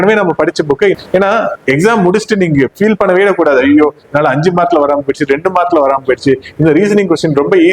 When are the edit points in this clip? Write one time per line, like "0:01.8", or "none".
0:01.0

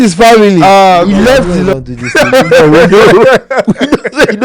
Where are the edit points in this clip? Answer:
0:01.6

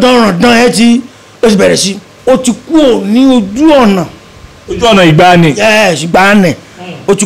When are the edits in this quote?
0:02.1

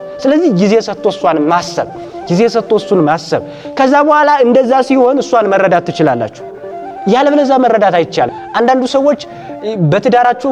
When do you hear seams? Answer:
0:08.3

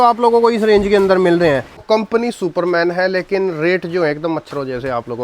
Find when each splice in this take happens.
0:01.8

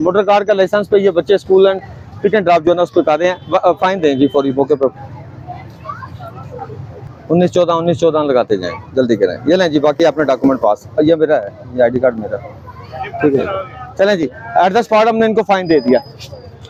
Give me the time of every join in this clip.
none

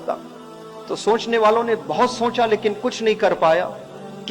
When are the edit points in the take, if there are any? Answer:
none

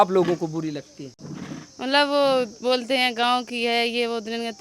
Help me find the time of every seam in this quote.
none

